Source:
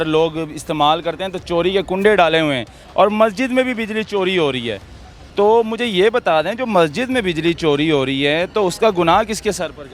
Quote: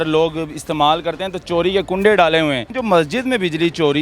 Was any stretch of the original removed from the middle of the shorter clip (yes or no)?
yes